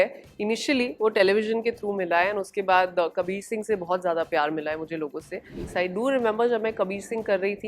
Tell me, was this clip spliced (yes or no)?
yes